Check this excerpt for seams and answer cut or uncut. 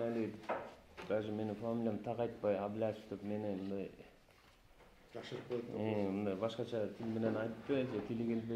uncut